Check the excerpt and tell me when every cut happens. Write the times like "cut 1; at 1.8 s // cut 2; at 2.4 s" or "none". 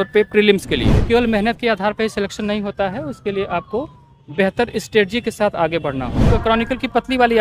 cut 1; at 1.0 s // cut 2; at 6.3 s